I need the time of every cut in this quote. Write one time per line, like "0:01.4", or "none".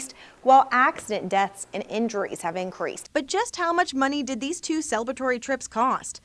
0:03.0